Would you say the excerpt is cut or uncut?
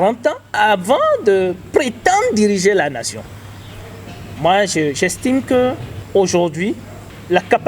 uncut